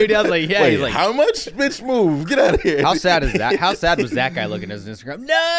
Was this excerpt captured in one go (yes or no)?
yes